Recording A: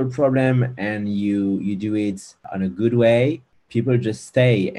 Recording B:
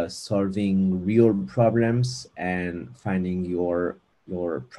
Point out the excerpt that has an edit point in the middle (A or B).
A